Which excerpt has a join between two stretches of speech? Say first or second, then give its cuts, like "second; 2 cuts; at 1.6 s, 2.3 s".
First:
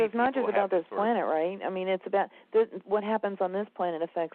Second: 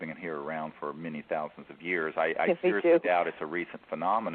second; 1 cut; at 2.6 s